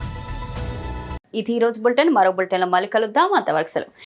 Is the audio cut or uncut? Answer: uncut